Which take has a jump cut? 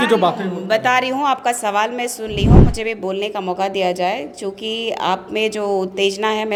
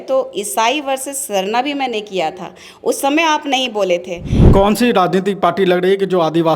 second; 1 cut; at 4.4 s

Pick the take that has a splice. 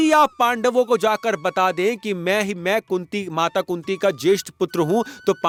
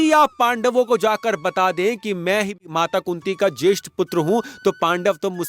second; 1 cut; at 2.6 s

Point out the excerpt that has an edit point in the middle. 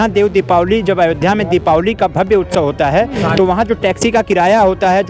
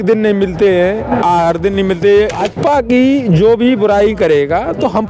second; 1 cut; at 2.4 s

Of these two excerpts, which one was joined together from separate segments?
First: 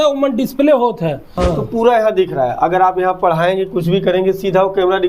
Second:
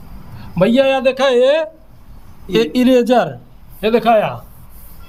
first; 1 cut; at 1.4 s

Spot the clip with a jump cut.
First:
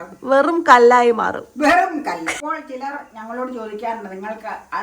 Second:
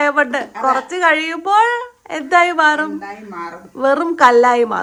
first; 1 cut; at 2.3 s

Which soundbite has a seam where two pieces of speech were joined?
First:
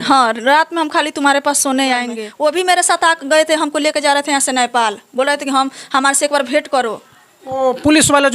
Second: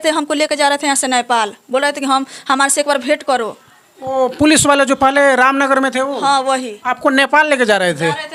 first; 1 cut; at 2.2 s

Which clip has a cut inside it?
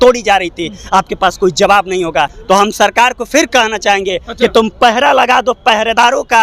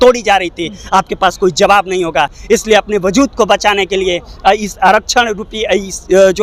first; 1 cut; at 2.4 s

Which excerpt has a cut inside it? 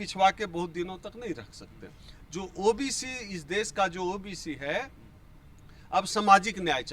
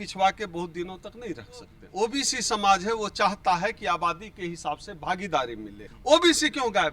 second; 2 cuts; at 1.8 s, 5.9 s

